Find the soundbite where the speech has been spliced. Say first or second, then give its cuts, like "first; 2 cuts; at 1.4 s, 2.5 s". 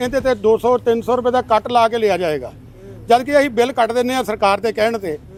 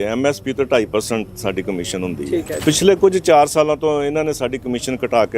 second; 1 cut; at 2.6 s